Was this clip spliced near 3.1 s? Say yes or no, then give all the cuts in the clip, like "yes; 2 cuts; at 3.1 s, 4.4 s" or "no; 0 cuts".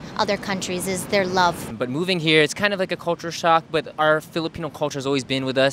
no; 1 cut; at 1.7 s